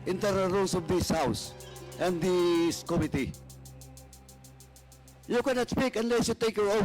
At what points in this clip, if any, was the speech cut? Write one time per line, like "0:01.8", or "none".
0:03.4
0:05.2